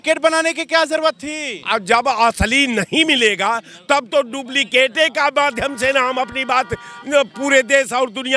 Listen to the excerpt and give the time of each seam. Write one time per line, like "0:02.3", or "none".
none